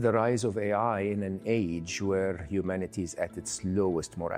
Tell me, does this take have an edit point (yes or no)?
no